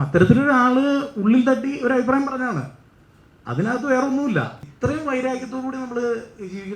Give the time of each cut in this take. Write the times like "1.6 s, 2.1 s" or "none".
4.6 s